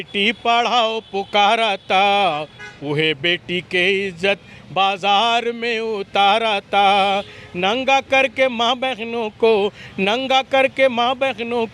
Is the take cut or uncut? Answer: uncut